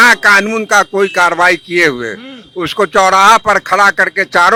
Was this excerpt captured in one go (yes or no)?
yes